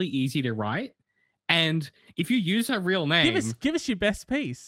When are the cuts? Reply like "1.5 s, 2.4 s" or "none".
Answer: none